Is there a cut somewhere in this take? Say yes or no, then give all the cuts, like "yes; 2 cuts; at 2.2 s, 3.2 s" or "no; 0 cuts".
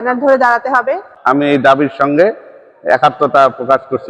yes; 1 cut; at 1.1 s